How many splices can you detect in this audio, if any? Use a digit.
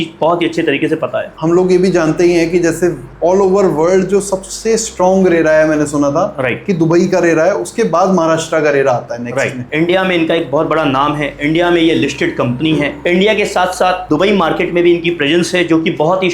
1